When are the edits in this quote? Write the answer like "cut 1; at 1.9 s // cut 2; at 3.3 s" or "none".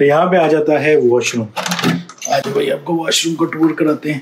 none